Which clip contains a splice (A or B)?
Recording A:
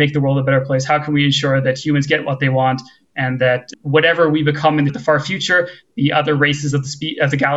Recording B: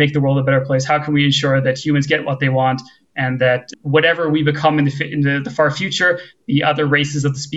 A